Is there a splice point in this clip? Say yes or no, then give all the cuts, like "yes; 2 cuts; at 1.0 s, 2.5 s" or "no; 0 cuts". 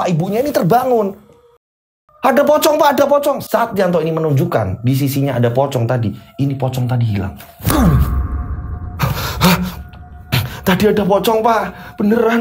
yes; 1 cut; at 1.6 s